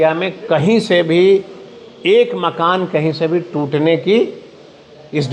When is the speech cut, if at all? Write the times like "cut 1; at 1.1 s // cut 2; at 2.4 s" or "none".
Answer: none